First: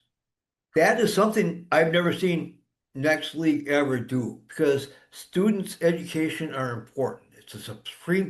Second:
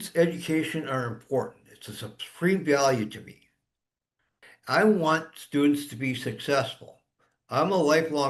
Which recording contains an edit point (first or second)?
first